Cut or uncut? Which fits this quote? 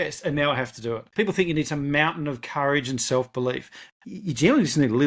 cut